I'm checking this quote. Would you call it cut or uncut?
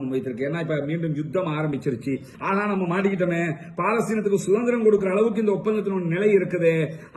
cut